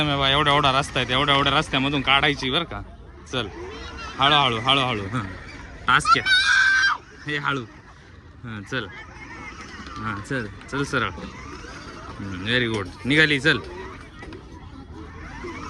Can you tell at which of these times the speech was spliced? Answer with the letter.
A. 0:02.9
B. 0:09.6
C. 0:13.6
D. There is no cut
D